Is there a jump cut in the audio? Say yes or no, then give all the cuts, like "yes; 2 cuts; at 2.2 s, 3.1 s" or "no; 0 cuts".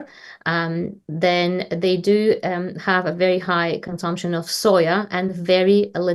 no; 0 cuts